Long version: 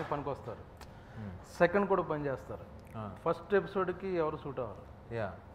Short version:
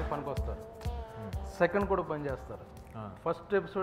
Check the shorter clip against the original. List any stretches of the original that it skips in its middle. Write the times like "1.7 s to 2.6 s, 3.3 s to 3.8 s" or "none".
none